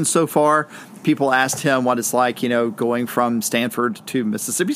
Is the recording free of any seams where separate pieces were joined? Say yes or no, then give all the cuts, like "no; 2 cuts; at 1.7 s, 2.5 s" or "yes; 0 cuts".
yes; 0 cuts